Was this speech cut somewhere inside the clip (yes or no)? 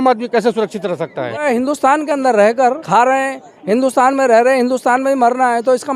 yes